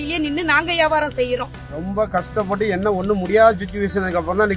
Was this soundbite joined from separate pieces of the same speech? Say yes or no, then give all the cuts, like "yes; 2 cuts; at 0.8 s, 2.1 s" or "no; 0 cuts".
yes; 1 cut; at 1.6 s